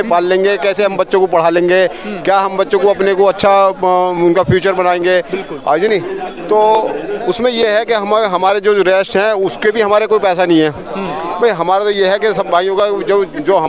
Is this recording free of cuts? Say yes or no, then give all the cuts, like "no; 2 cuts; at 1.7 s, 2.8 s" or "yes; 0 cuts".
yes; 0 cuts